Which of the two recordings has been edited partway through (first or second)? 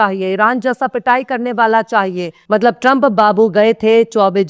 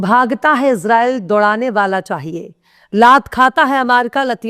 first